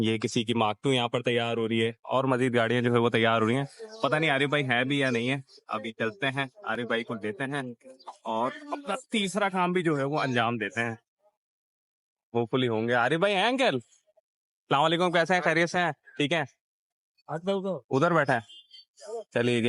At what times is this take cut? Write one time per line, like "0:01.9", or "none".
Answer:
none